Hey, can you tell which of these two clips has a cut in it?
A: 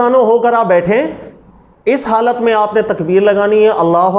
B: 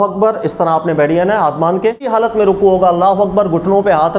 B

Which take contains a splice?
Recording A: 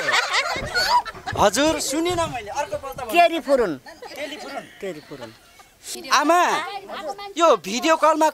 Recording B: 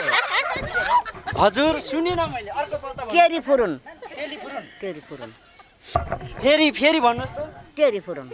A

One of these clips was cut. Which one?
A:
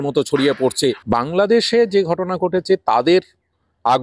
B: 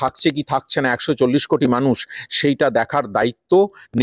A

